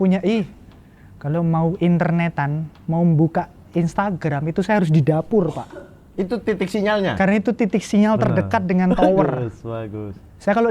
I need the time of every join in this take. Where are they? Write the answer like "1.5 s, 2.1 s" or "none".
none